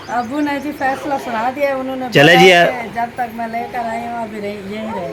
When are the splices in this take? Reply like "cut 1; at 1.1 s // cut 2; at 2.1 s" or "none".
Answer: none